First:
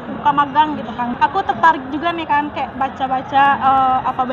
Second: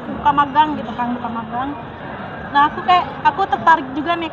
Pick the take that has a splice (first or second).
first